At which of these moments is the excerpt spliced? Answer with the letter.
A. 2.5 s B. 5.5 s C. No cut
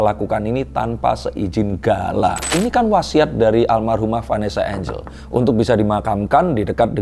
A